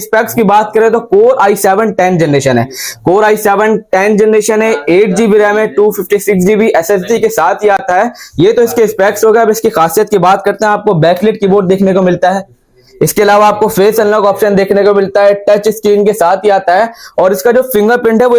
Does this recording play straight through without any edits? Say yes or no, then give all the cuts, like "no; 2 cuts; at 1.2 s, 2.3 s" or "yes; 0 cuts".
yes; 0 cuts